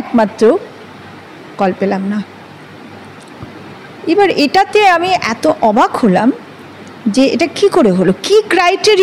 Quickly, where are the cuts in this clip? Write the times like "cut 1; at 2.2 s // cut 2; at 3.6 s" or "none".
none

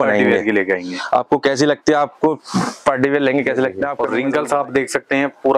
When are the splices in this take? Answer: cut 1; at 4.0 s

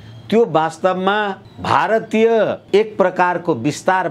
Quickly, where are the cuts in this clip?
cut 1; at 1.5 s // cut 2; at 2.6 s

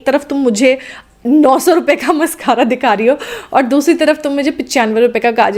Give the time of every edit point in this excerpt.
none

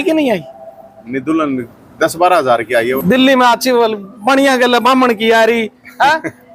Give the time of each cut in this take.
cut 1; at 3.0 s

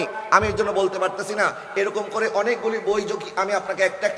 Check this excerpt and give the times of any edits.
none

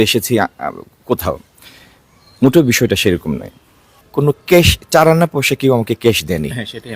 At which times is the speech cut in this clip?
cut 1; at 3.9 s

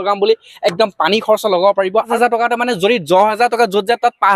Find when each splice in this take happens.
cut 1; at 2.1 s

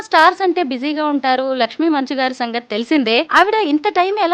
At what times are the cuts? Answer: cut 1; at 3.3 s

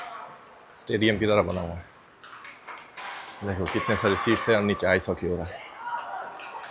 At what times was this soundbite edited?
none

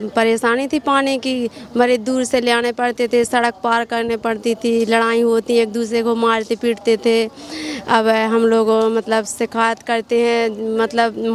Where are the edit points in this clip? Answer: none

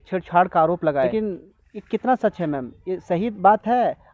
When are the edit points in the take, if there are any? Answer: cut 1; at 1.1 s

